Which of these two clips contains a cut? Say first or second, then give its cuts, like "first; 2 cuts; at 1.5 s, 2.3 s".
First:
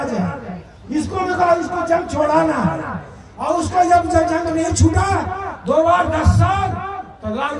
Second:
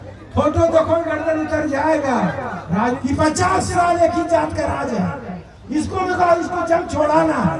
second; 1 cut; at 3.0 s